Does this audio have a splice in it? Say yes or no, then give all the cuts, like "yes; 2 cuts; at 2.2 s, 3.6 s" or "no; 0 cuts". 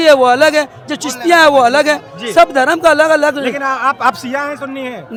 no; 0 cuts